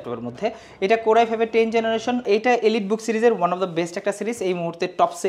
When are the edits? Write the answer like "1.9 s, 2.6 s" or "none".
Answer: 2.2 s